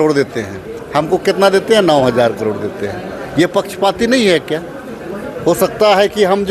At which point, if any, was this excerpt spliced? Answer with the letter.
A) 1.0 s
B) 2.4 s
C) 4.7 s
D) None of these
D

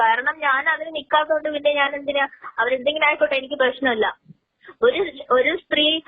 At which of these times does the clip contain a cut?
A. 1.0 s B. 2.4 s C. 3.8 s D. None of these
D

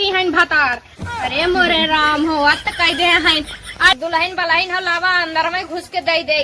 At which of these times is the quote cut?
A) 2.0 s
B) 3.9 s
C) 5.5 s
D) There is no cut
B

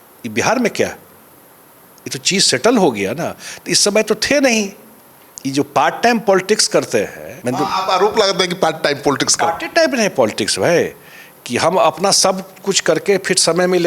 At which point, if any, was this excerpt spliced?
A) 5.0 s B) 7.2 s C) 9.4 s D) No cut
B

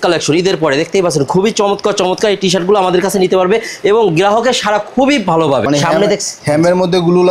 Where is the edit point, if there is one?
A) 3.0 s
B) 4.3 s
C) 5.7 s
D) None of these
C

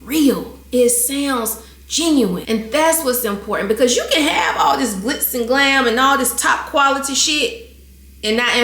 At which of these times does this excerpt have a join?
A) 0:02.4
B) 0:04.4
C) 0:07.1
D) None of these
A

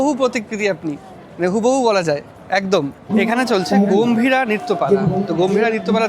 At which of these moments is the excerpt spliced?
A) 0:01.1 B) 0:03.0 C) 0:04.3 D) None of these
B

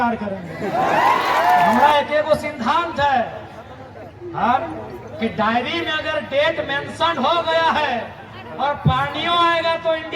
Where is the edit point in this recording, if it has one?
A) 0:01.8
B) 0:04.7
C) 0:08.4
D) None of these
A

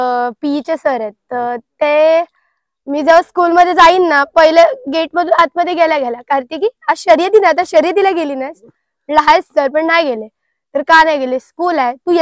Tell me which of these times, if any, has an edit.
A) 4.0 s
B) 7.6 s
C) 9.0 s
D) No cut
D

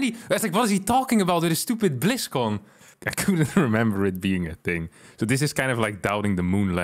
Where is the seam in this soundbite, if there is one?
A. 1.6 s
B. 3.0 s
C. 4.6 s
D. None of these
B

